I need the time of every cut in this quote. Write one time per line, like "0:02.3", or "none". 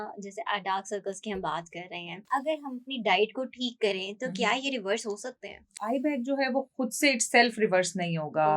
0:02.1
0:05.8